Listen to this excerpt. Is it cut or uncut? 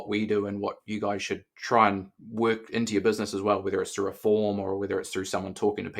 cut